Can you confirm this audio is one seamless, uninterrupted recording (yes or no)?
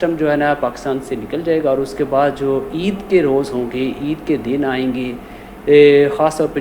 yes